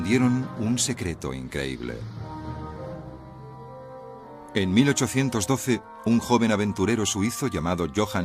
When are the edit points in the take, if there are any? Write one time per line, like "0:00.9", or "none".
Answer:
none